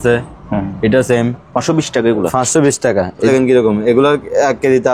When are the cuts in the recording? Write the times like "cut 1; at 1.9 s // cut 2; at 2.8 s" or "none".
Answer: cut 1; at 3.3 s